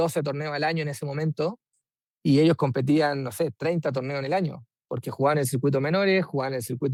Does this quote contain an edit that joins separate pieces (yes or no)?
no